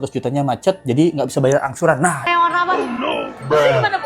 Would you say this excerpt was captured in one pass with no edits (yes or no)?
no